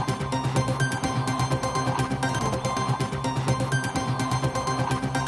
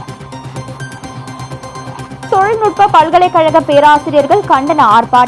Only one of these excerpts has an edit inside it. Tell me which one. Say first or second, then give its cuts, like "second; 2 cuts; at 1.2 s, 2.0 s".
first; 1 cut; at 2.2 s